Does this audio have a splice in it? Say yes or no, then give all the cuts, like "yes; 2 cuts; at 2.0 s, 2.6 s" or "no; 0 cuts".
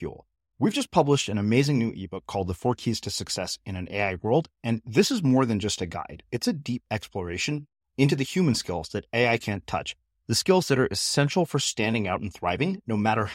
no; 0 cuts